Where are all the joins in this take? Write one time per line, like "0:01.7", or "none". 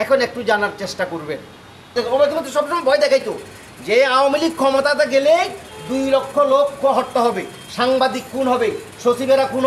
0:01.9